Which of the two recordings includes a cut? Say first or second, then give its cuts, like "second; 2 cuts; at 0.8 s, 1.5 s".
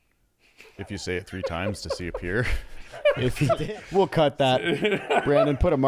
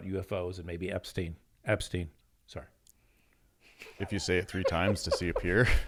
first; 1 cut; at 3.6 s